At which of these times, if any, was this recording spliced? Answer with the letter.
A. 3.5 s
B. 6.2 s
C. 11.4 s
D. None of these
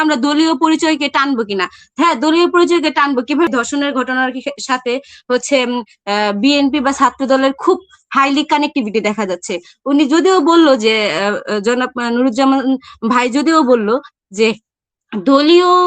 A